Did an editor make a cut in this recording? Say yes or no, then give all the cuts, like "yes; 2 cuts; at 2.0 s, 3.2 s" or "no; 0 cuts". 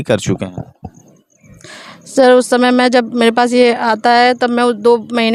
no; 0 cuts